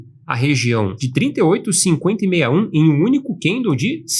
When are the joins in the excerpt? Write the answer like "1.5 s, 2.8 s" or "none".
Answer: 1.0 s